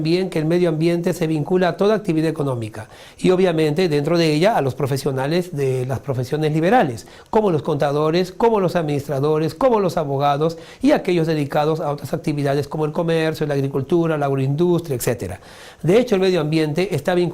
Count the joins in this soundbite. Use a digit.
1